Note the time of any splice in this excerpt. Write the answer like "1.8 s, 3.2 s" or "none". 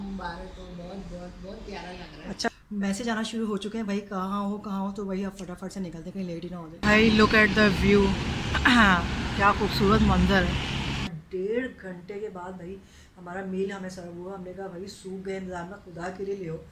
2.5 s, 6.8 s, 11.1 s